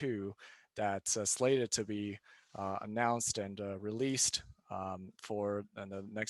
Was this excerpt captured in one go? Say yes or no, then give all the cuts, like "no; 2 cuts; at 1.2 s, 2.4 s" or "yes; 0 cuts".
yes; 0 cuts